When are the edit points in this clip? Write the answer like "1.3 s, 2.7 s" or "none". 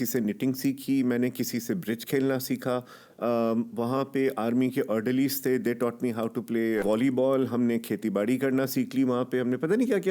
6.8 s